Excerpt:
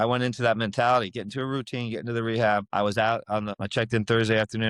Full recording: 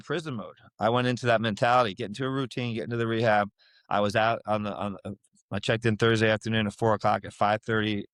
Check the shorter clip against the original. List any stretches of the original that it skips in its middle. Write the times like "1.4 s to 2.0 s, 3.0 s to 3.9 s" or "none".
3.5 s to 3.8 s, 4.7 s to 5.4 s